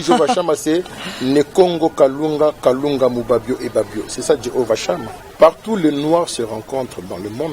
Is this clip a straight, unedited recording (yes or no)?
no